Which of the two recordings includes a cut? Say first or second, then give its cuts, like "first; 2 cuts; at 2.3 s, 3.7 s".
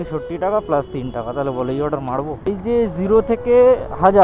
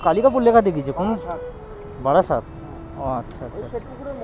first; 1 cut; at 2.5 s